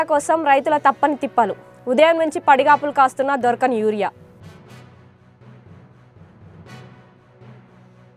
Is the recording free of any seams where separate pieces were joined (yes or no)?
yes